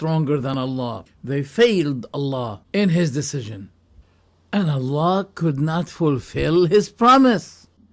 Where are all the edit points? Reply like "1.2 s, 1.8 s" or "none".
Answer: none